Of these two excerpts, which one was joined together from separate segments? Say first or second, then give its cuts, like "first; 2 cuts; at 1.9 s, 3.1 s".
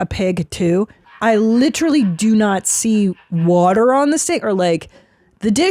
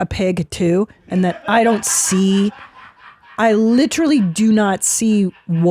first; 1 cut; at 1.0 s